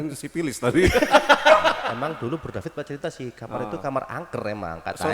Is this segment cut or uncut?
cut